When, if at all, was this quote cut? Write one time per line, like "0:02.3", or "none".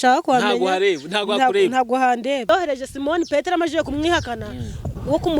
0:02.5